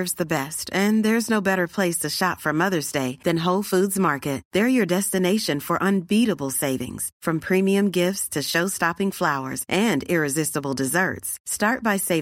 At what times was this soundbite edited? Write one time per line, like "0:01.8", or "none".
none